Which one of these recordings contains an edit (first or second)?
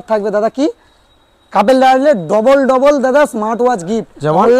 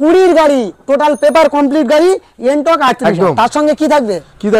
second